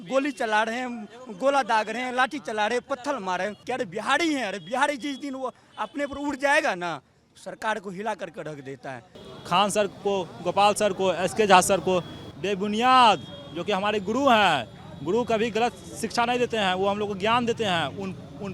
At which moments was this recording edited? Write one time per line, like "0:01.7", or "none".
0:03.6
0:09.2